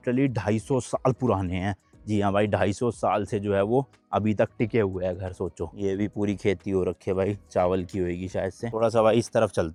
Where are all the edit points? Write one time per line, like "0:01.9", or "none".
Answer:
none

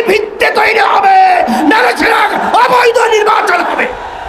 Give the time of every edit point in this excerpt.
none

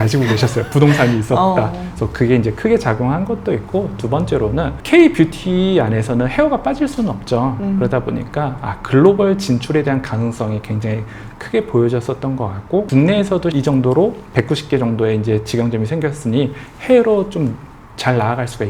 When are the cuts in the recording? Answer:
none

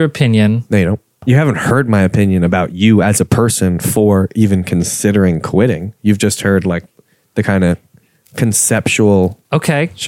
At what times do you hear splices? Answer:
0:01.2

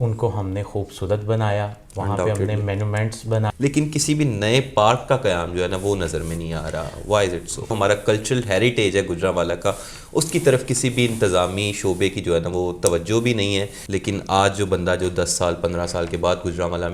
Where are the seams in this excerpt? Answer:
0:03.5
0:07.7
0:13.8

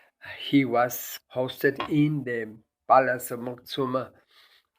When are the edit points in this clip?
0:01.1

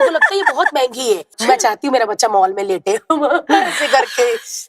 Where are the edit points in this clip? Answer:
0:01.4

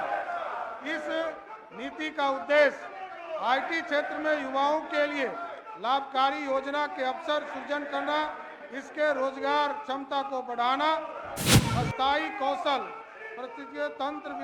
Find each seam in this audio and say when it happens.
0:11.4

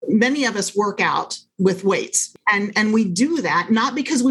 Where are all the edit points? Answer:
0:01.5
0:02.2

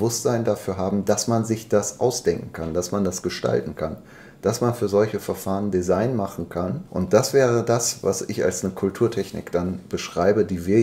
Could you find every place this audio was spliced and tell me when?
0:06.8

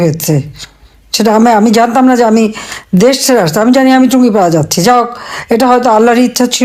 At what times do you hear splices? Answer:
none

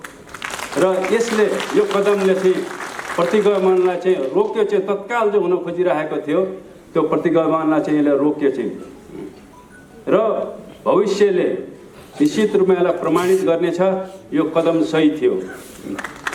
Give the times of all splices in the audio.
none

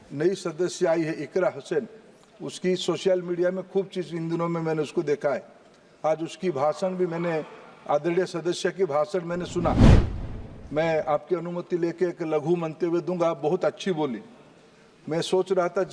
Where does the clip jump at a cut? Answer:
none

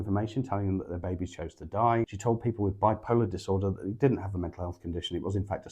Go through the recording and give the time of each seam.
0:02.2

